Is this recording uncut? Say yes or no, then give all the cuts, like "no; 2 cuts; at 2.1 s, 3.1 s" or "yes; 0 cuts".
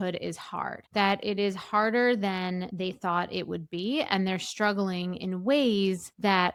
yes; 0 cuts